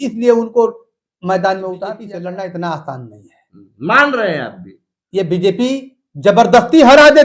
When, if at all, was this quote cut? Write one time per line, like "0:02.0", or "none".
0:02.1